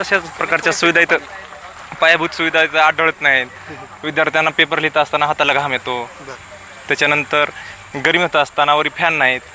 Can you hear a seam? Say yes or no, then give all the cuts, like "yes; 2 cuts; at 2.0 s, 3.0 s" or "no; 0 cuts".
no; 0 cuts